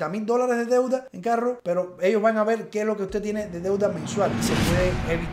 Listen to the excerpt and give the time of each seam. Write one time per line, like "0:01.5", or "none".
0:04.4